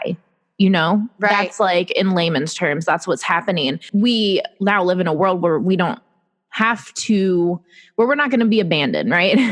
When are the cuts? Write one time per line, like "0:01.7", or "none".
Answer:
0:03.8